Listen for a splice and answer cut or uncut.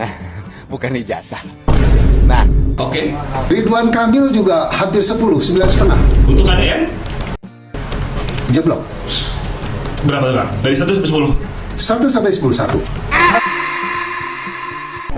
cut